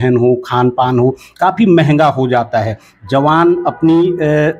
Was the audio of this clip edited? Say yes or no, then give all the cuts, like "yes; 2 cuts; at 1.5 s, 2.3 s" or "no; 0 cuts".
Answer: no; 0 cuts